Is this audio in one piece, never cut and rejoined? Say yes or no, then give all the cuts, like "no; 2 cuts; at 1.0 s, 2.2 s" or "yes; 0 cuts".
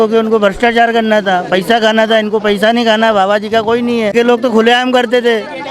no; 1 cut; at 4.1 s